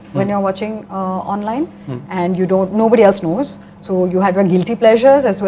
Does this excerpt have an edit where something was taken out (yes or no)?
no